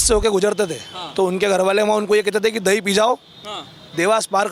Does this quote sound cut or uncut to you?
uncut